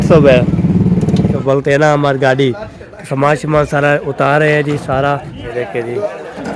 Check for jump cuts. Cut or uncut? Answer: cut